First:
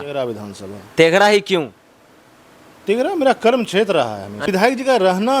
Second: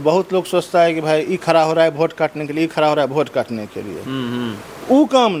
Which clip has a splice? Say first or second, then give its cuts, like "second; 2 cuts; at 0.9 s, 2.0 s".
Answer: first; 1 cut; at 4.5 s